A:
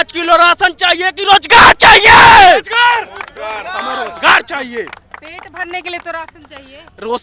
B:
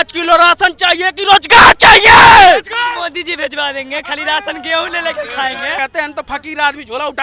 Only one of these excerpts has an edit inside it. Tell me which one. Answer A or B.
B